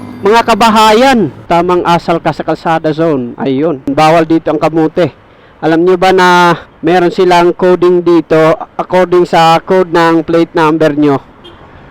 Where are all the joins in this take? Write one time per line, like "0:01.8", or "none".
0:01.4
0:03.9
0:06.7